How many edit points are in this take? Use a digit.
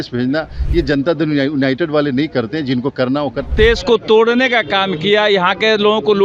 1